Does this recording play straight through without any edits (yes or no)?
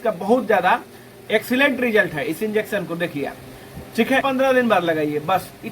no